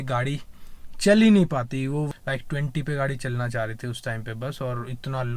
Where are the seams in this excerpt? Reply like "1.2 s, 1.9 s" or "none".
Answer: 2.1 s

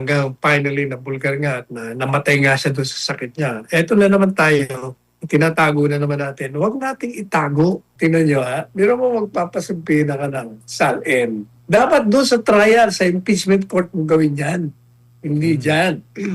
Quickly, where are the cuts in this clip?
7.9 s

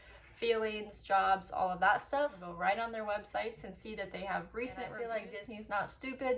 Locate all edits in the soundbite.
2.4 s, 4.9 s

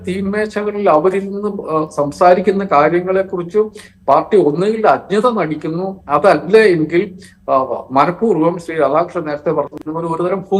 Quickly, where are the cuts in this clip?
none

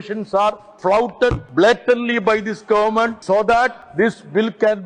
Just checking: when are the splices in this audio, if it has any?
1.0 s, 3.6 s

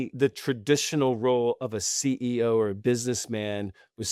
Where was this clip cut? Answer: none

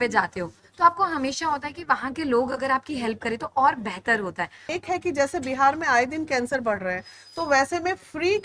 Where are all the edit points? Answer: 4.7 s

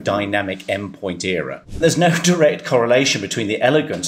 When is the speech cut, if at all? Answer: 1.8 s

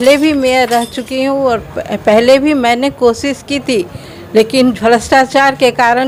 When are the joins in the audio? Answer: none

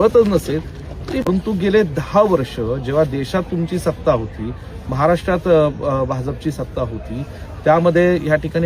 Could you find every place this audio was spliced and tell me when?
1.2 s

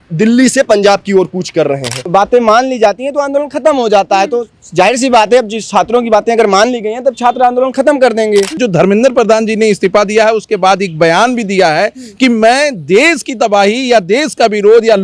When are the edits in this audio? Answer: 1.9 s, 8.6 s

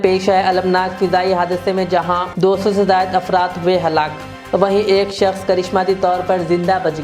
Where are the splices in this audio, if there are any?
none

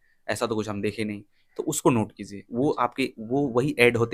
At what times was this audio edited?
none

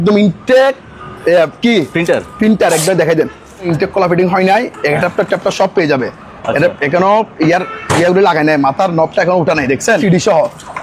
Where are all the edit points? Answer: 3.7 s, 10.0 s

